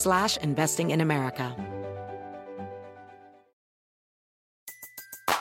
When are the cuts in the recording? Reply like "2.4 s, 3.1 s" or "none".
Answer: 1.5 s